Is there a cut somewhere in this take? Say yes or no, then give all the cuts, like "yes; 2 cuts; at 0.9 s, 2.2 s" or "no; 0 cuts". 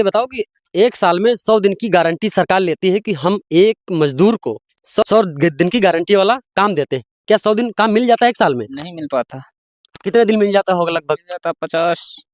yes; 1 cut; at 5.0 s